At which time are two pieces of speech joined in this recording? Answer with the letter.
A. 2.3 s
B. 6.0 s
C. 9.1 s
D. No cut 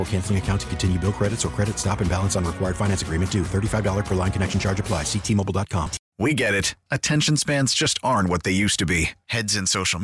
B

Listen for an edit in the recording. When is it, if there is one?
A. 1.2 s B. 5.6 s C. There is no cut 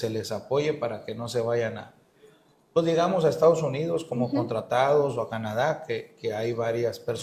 C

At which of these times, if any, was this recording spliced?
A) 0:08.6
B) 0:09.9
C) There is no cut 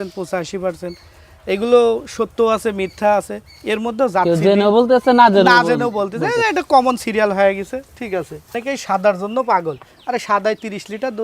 A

